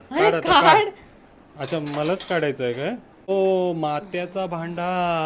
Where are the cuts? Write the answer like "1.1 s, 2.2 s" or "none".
3.3 s